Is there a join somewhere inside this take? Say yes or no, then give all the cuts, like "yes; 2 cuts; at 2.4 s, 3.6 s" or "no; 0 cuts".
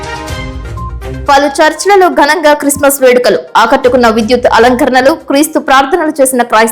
yes; 1 cut; at 1.0 s